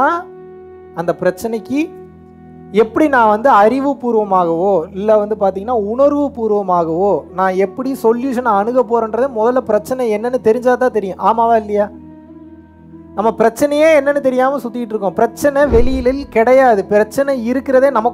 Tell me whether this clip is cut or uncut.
uncut